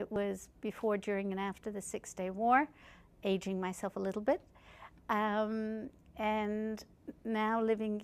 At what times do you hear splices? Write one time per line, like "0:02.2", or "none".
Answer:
none